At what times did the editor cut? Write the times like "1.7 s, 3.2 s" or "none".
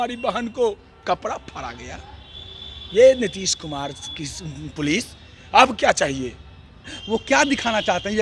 6.9 s